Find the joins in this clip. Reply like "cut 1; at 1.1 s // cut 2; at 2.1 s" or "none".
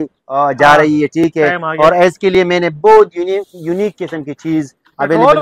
none